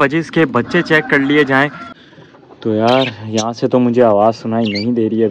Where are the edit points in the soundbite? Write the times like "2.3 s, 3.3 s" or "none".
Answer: 1.8 s